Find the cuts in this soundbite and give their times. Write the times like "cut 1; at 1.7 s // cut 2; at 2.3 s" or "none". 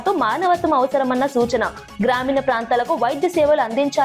none